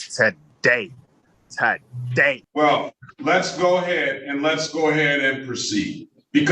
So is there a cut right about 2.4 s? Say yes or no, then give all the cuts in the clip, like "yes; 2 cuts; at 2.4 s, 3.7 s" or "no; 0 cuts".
yes; 1 cut; at 2.4 s